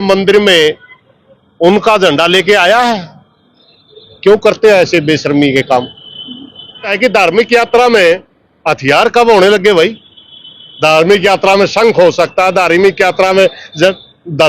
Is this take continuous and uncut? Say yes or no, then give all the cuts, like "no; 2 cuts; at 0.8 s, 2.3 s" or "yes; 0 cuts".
no; 1 cut; at 6.9 s